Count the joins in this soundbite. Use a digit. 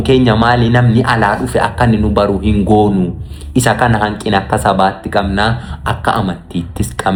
0